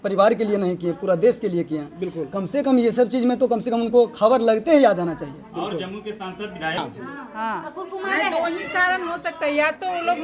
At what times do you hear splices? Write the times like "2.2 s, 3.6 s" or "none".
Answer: 6.8 s